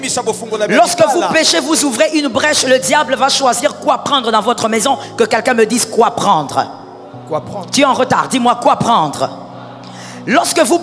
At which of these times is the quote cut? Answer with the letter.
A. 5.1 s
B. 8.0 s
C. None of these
C